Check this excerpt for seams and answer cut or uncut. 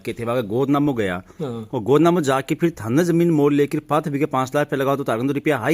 uncut